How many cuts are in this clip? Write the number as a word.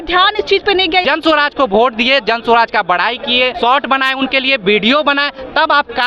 one